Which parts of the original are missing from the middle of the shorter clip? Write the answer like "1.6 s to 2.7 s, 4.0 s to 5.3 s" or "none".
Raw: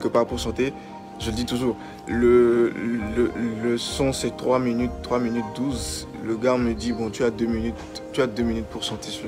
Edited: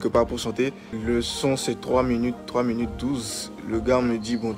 1.0 s to 3.5 s